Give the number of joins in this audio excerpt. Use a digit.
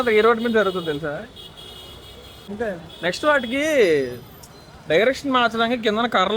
1